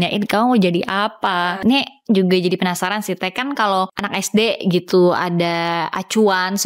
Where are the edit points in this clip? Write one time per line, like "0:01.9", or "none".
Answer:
0:01.6
0:04.0

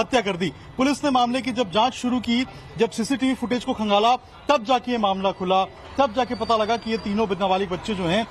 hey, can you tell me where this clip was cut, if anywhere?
none

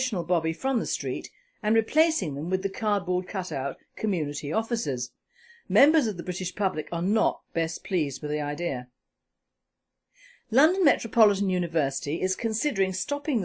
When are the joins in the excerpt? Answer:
none

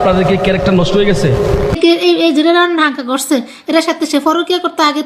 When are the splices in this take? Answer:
0:01.8

